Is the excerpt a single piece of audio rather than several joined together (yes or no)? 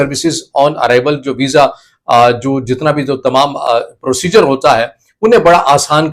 yes